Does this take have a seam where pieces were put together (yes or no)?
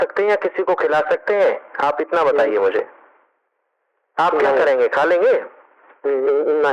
no